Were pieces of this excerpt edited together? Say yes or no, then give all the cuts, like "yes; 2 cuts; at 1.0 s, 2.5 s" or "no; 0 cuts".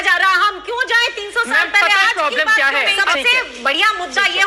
yes; 1 cut; at 3.0 s